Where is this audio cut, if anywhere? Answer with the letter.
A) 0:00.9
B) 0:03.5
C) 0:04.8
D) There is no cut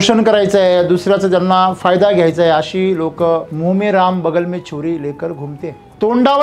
B